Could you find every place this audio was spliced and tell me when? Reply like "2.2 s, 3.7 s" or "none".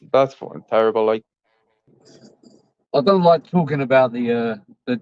1.9 s